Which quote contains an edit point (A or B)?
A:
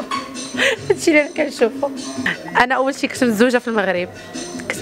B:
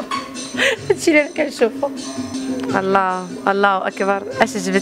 A